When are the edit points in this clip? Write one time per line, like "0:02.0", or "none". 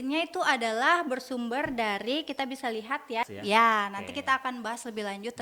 0:03.3